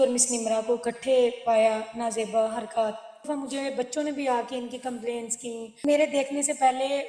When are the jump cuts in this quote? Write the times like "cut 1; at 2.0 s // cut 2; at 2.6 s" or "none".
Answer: cut 1; at 3.3 s // cut 2; at 5.8 s